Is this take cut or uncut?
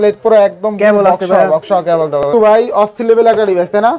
cut